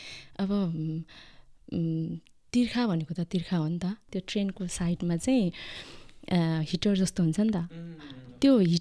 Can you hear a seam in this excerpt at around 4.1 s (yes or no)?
yes